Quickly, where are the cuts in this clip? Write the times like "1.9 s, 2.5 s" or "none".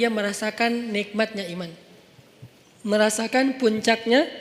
none